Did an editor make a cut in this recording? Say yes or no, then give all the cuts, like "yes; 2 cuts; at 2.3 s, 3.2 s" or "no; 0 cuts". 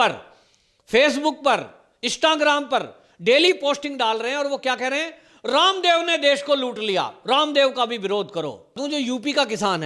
yes; 1 cut; at 8.8 s